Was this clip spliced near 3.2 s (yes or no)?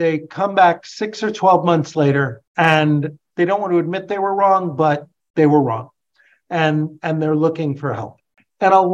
yes